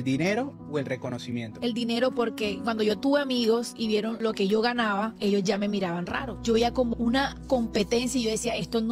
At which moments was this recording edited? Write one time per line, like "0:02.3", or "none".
none